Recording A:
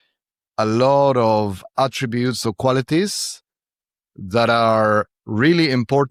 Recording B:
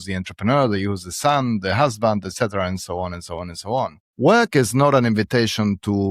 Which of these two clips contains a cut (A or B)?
B